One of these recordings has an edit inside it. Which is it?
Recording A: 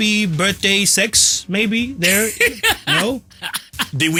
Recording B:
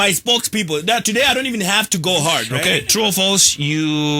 B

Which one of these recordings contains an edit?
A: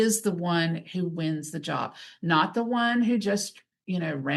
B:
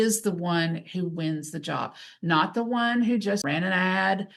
B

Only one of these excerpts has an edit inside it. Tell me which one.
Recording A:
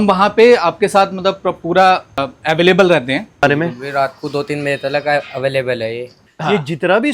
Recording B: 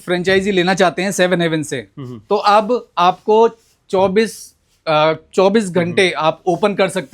A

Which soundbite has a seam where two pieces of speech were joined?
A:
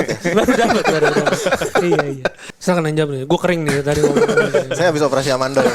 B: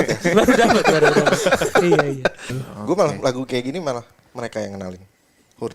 A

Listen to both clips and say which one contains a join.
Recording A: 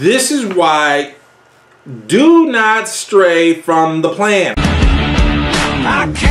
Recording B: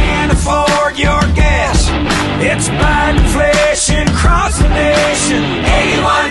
A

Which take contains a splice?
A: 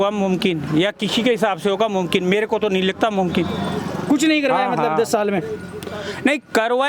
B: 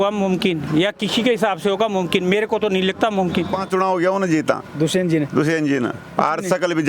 B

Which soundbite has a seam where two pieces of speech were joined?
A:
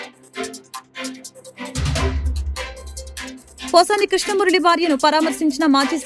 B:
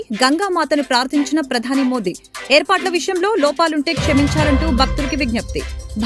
A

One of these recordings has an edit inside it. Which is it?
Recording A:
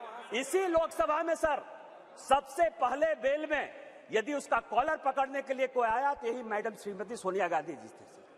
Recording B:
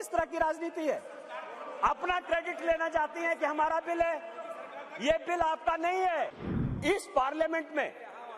B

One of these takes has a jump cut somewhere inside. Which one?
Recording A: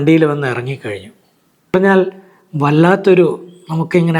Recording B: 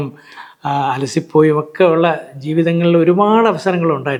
A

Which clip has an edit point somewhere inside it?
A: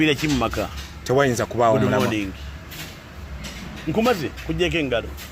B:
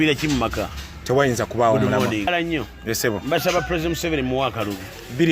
B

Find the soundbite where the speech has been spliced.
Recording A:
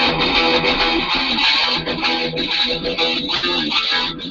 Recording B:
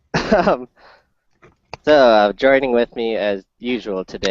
B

